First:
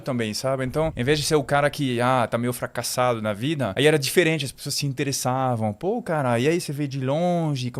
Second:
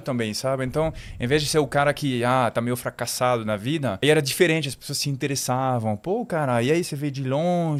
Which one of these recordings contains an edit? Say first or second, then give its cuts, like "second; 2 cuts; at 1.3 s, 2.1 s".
first; 1 cut; at 1.0 s